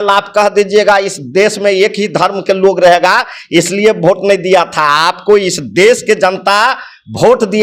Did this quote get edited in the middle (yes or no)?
no